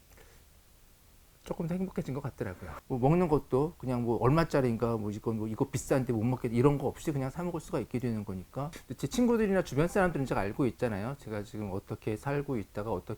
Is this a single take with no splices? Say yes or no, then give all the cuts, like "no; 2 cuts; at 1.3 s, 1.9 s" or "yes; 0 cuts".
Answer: no; 2 cuts; at 2.7 s, 8.8 s